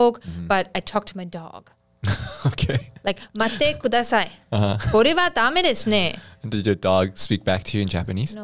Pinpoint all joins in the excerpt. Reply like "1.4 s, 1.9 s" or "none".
none